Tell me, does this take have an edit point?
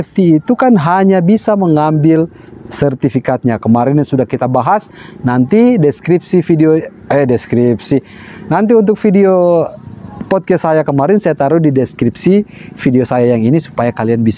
no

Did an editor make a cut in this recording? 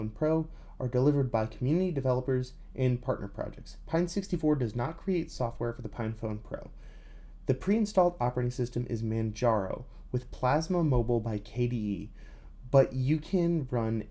no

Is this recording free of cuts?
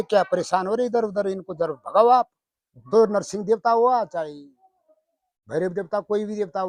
yes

